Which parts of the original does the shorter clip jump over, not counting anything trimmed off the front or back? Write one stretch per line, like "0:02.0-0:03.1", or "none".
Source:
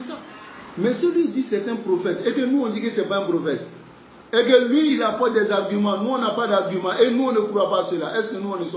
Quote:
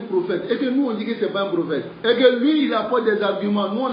0:03.7-0:04.2